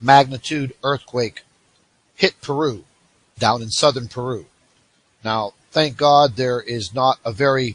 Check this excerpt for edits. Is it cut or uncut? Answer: uncut